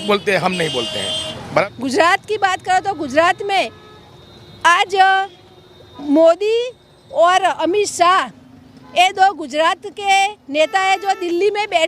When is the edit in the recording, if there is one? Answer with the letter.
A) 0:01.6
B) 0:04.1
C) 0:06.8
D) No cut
A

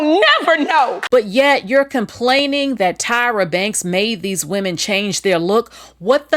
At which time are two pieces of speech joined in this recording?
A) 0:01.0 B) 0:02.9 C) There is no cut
A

